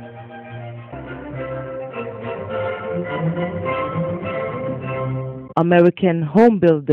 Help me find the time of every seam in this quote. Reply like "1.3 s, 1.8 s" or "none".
5.4 s